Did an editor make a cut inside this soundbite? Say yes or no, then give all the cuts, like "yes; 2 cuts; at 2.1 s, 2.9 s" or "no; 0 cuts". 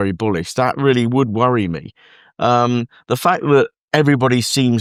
no; 0 cuts